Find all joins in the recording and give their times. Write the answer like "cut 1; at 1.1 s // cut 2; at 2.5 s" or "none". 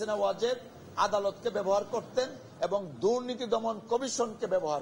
none

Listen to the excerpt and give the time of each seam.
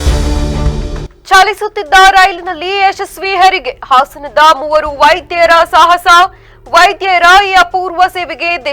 cut 1; at 1.0 s

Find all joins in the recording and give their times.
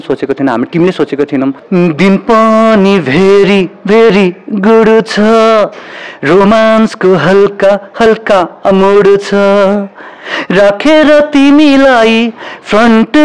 cut 1; at 1.6 s

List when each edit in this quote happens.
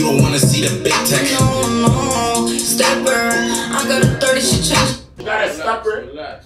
cut 1; at 5.1 s

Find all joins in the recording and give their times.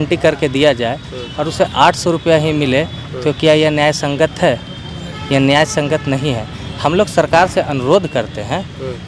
none

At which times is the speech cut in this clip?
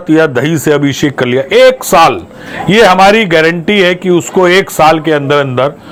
none

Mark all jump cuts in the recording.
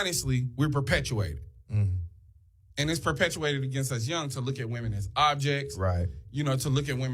cut 1; at 2.5 s

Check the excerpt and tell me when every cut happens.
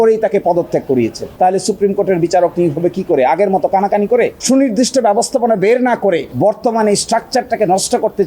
cut 1; at 1.3 s // cut 2; at 4.4 s

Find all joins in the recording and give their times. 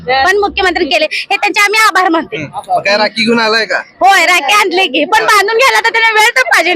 none

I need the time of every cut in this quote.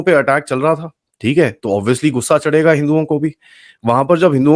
none

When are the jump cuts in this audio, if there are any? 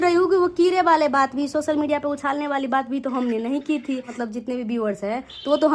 cut 1; at 4.2 s

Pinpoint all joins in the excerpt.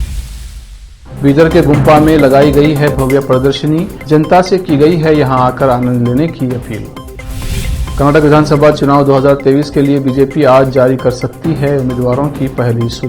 cut 1; at 1.0 s

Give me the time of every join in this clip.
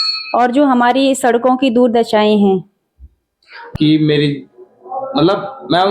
cut 1; at 3.6 s

